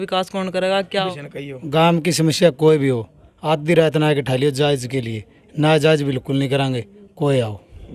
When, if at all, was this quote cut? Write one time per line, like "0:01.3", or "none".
0:01.1